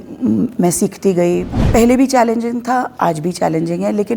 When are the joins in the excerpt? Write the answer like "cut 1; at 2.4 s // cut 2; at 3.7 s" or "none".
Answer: cut 1; at 1.6 s